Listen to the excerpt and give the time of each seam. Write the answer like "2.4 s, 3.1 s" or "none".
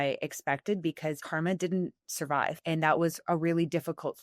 1.2 s, 2.6 s